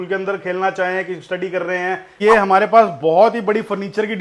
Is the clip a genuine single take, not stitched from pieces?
no; 1 cut; at 2.2 s

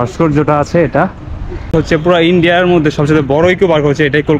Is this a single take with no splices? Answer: no; 1 cut; at 1.7 s

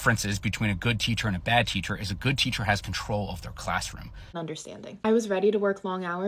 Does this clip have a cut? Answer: yes; 1 cut; at 4.4 s

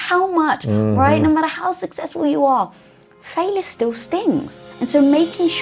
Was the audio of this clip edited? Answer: yes; 1 cut; at 4.6 s

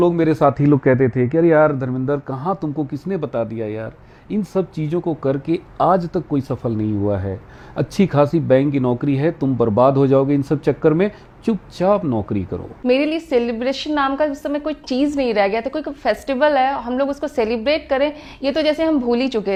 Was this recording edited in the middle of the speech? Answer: no; 0 cuts

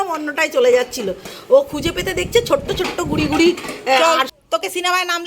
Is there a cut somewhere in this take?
yes; 1 cut; at 4.0 s

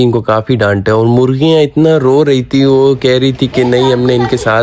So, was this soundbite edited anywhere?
no; 0 cuts

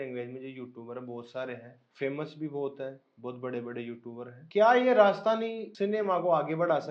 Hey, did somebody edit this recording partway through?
yes; 3 cuts; at 1.8 s, 4.3 s, 5.6 s

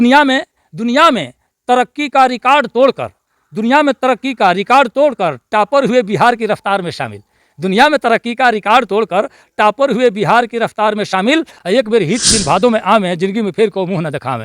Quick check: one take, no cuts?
no; 1 cut; at 11.5 s

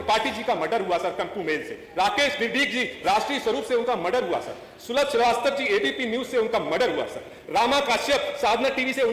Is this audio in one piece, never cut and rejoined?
yes; 0 cuts

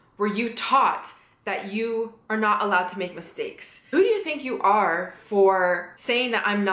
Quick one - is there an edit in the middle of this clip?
yes; 1 cut; at 3.8 s

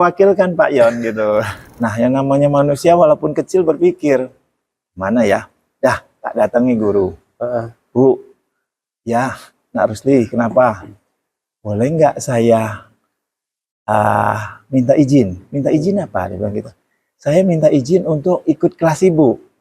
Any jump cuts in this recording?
yes; 1 cut; at 1.6 s

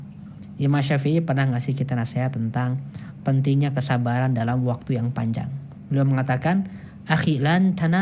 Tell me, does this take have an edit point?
no; 0 cuts

